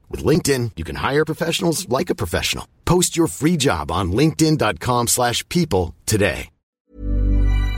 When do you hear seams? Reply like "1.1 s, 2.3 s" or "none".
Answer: 6.8 s